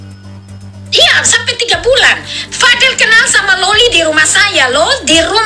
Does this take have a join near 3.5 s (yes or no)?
no